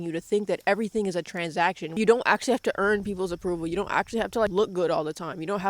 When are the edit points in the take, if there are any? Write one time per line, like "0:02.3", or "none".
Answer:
0:01.9